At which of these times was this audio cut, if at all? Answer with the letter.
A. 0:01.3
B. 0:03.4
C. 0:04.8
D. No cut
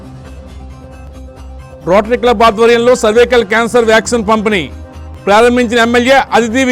A